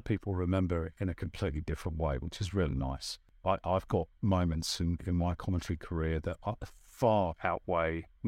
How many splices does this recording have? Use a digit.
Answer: 1